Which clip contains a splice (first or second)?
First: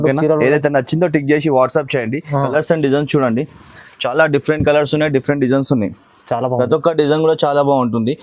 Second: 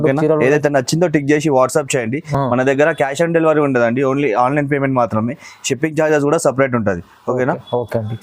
first